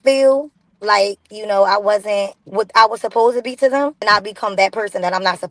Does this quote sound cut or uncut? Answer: cut